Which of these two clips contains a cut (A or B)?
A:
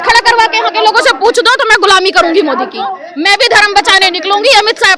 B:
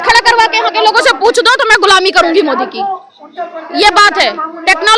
A